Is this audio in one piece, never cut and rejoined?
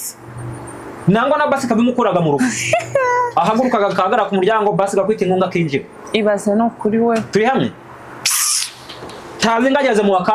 yes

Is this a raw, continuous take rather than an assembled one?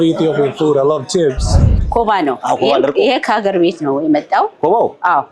no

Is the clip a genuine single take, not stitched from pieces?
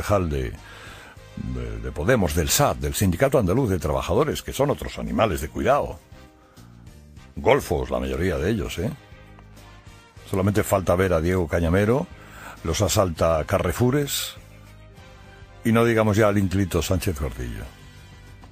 no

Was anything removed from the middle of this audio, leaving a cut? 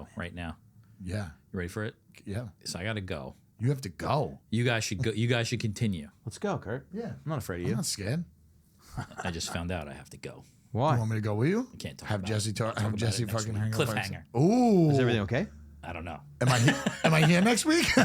yes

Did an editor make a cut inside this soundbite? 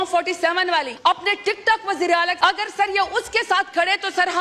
yes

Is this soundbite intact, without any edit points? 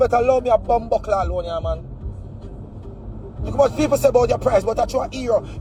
yes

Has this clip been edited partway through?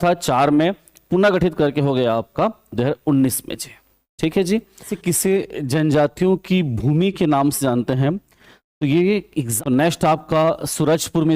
yes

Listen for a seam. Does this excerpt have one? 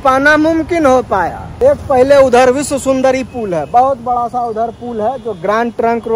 yes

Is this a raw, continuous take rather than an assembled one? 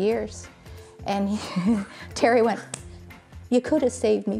yes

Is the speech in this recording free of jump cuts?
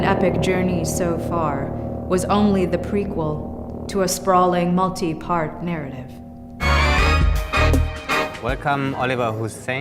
no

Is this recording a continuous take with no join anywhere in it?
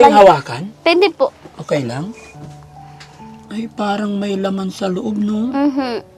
yes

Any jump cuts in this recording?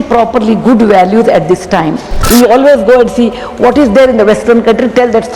yes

